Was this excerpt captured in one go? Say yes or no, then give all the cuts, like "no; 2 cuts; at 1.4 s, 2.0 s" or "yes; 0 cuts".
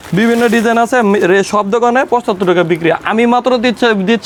yes; 0 cuts